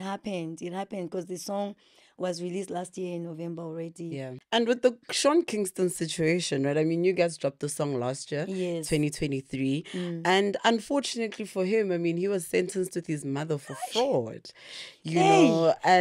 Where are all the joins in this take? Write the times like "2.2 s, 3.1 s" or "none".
4.4 s